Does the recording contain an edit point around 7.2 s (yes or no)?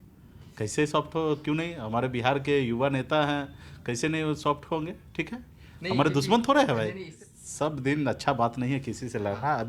yes